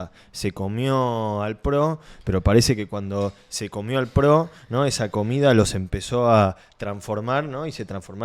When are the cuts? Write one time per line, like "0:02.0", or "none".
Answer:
none